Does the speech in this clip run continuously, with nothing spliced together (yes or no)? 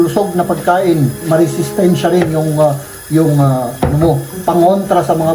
no